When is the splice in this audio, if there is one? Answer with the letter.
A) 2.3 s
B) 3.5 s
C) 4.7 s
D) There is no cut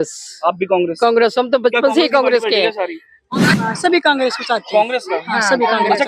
B